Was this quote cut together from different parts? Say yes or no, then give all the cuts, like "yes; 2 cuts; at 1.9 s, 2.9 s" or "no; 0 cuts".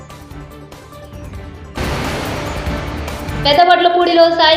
yes; 2 cuts; at 1.8 s, 3.4 s